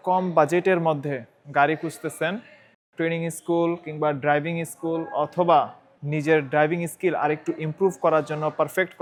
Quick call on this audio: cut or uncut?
uncut